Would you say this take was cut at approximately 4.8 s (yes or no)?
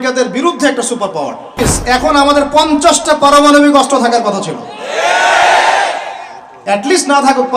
no